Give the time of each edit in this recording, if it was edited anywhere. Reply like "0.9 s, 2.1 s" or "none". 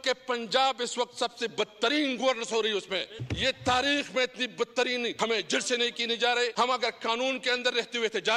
3.2 s, 5.1 s, 6.5 s